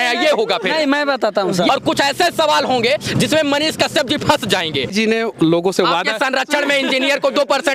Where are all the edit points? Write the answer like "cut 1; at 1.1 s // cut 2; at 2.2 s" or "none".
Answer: cut 1; at 1.7 s // cut 2; at 4.9 s

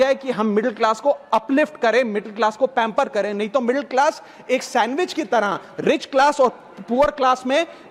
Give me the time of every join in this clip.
none

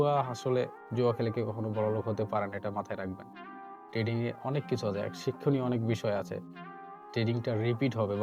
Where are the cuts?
none

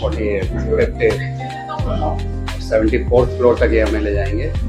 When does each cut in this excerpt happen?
none

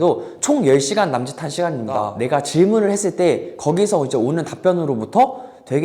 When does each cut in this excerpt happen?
cut 1; at 2.1 s

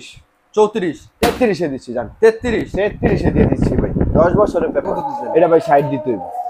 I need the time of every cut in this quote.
cut 1; at 4.9 s

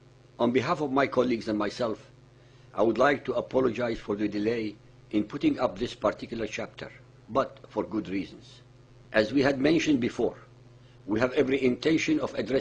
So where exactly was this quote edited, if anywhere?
cut 1; at 10.7 s

